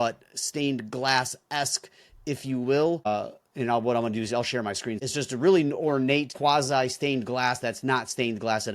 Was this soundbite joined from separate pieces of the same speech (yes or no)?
yes